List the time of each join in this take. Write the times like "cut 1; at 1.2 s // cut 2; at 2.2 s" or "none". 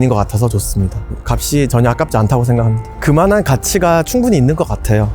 cut 1; at 1.1 s

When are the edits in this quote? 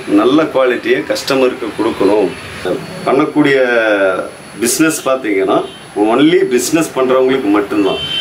cut 1; at 2.7 s

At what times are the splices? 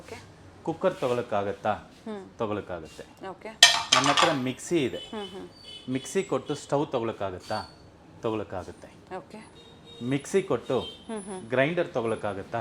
none

